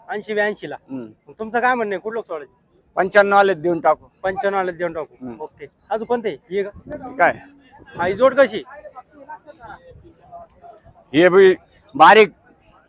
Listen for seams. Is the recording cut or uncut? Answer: uncut